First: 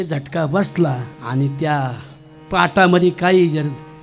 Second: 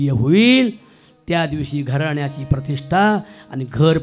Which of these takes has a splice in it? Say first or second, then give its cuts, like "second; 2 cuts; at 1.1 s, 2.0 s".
first; 1 cut; at 1.1 s